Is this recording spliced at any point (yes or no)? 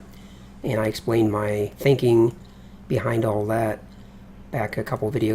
yes